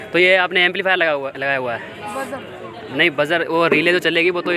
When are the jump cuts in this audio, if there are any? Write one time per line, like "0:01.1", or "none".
none